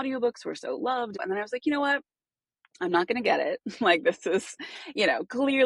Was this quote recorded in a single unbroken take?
no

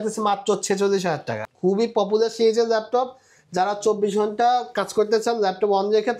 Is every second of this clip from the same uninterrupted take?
no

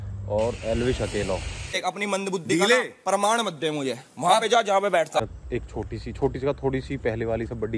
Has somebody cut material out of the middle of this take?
yes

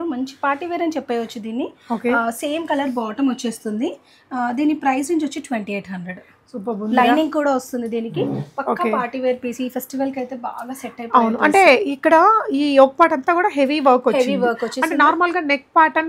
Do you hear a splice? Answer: no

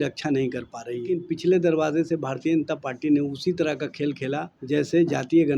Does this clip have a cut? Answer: yes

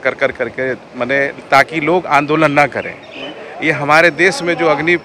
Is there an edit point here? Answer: no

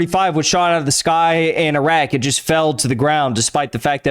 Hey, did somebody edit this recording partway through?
no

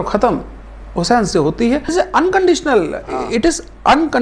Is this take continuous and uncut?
no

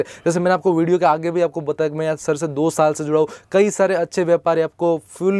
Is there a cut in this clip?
no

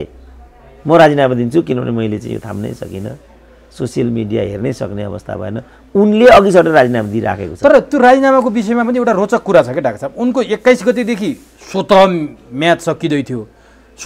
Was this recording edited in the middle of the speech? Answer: no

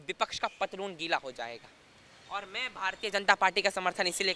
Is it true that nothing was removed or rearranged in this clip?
yes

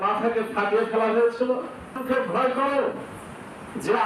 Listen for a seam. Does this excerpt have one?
yes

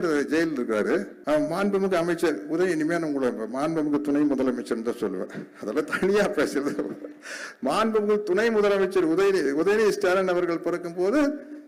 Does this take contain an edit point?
yes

